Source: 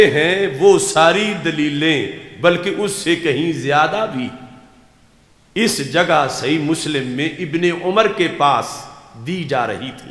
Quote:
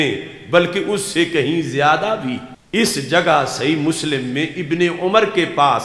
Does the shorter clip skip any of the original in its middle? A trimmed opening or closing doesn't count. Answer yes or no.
yes